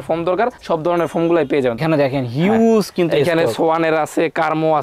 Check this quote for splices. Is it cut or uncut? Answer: cut